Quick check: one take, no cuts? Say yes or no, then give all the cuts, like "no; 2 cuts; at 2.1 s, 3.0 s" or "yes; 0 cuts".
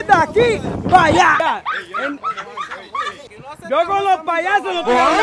no; 2 cuts; at 1.4 s, 3.3 s